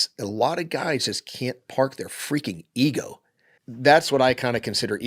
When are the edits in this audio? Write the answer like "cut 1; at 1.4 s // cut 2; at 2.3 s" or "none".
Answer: cut 1; at 3.6 s